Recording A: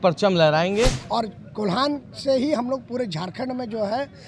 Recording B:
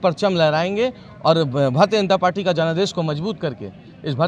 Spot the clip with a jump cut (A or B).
A